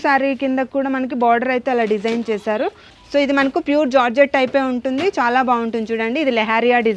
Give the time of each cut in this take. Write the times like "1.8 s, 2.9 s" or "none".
2.9 s